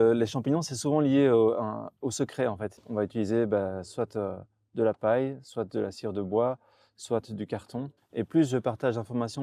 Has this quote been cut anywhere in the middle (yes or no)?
yes